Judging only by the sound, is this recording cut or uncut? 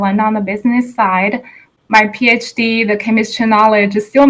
cut